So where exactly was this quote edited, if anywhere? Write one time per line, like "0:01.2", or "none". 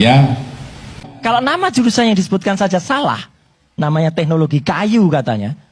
none

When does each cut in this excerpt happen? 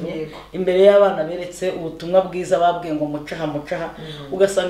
none

